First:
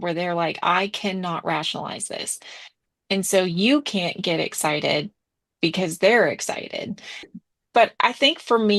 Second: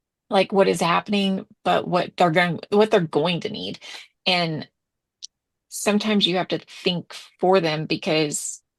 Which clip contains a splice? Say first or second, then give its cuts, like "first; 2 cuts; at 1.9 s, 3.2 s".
first; 1 cut; at 7.4 s